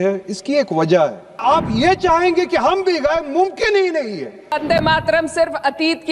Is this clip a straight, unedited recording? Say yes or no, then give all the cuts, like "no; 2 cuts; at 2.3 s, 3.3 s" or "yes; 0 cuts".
no; 2 cuts; at 1.4 s, 4.6 s